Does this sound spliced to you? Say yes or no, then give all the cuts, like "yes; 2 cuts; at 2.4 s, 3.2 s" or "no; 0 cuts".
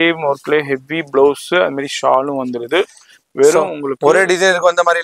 no; 0 cuts